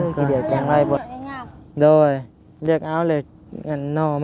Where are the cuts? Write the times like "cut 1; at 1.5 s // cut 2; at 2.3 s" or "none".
cut 1; at 1.0 s